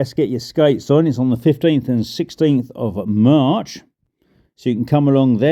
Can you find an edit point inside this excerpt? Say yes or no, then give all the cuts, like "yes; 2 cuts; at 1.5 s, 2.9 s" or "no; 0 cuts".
no; 0 cuts